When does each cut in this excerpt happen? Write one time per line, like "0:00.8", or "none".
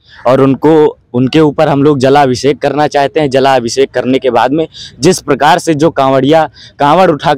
none

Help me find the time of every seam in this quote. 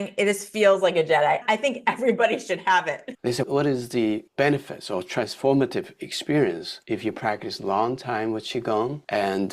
0:01.4
0:03.1

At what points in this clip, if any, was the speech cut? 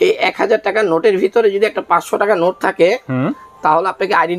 none

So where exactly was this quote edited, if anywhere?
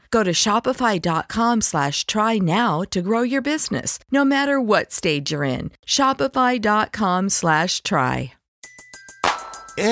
0:08.4

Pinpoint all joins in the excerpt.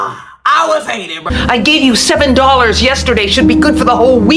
0:01.2

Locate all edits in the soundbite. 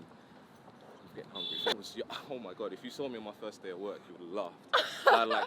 0:01.8

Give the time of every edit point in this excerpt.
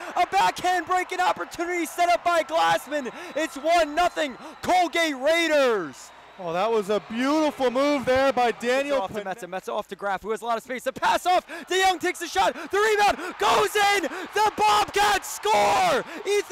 0:09.1

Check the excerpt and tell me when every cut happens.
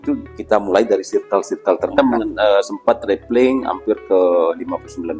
0:02.0

